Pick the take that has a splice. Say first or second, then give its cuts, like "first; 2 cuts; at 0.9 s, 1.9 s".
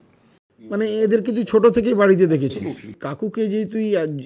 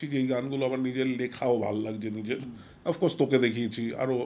first; 1 cut; at 3.0 s